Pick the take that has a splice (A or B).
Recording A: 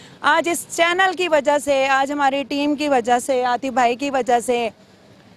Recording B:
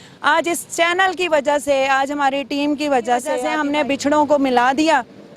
B